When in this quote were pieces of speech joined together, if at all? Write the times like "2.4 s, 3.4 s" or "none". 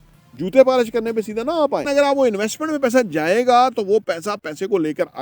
1.9 s